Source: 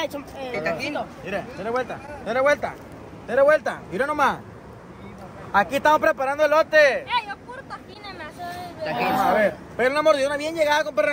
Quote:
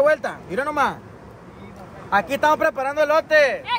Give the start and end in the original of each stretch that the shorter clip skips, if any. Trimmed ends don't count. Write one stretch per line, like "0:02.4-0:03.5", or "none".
none